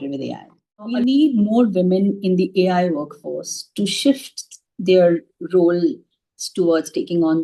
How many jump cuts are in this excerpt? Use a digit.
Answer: 1